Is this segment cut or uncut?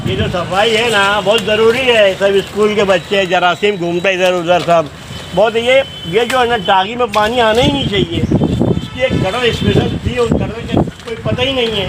uncut